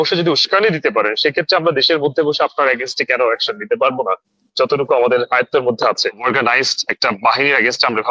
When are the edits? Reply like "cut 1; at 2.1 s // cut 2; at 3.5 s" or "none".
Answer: cut 1; at 6.3 s